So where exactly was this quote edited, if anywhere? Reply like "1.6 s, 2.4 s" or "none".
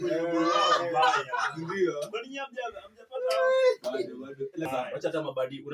4.7 s